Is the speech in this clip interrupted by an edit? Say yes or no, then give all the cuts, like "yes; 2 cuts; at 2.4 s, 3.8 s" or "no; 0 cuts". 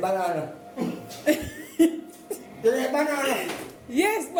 no; 0 cuts